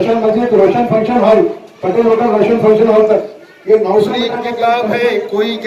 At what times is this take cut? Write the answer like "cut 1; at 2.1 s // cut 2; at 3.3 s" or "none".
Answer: cut 1; at 4.5 s